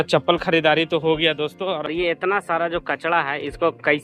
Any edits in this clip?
yes; 1 cut; at 1.9 s

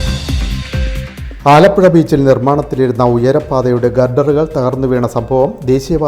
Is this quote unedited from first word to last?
no; 1 cut; at 1.0 s

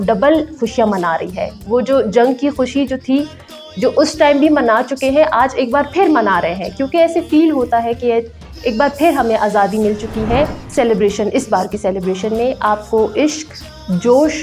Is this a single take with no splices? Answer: yes; 0 cuts

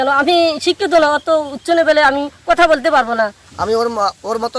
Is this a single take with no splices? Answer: no; 1 cut; at 3.5 s

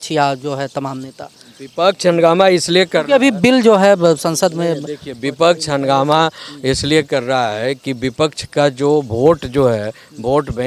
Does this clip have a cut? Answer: no; 0 cuts

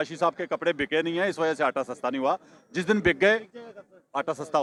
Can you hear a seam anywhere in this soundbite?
no; 0 cuts

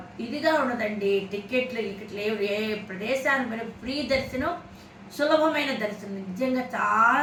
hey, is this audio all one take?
yes; 0 cuts

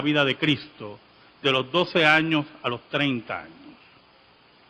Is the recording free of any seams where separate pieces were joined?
no; 1 cut; at 3.1 s

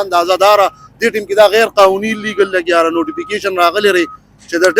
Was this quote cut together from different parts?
no; 0 cuts

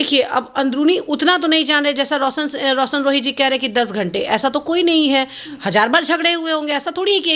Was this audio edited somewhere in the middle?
no; 0 cuts

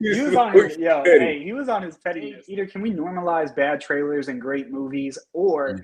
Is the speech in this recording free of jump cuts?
no; 1 cut; at 2.5 s

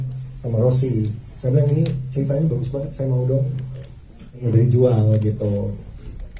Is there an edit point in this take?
yes; 1 cut; at 4.5 s

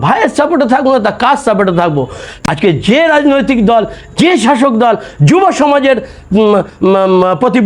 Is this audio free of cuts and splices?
no; 1 cut; at 2.3 s

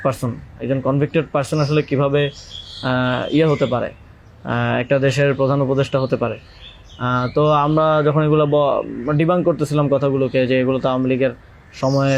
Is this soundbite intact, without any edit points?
yes; 0 cuts

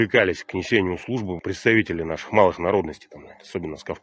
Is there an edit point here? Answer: yes; 1 cut; at 1.3 s

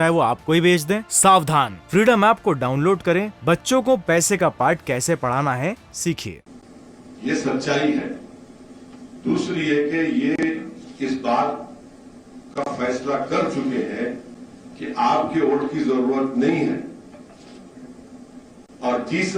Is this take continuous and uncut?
no; 1 cut; at 6.3 s

